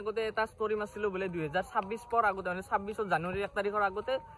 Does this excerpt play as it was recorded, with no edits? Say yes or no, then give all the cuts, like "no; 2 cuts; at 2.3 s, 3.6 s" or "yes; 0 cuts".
yes; 0 cuts